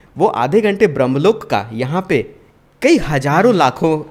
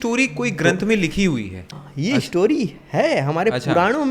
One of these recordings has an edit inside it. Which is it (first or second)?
second